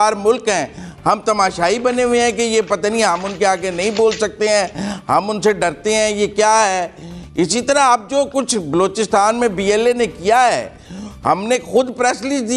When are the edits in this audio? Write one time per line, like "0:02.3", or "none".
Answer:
none